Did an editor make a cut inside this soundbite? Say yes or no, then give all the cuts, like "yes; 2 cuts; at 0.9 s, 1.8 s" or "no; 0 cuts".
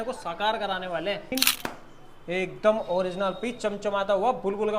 yes; 1 cut; at 1.3 s